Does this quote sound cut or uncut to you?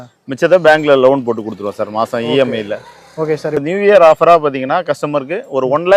uncut